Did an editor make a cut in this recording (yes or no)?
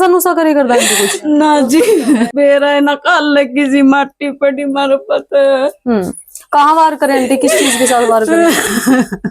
yes